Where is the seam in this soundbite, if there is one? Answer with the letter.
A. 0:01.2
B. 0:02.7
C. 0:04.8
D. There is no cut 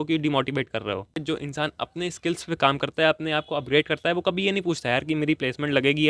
A